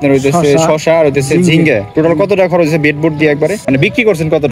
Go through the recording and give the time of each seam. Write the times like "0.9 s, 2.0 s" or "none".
3.6 s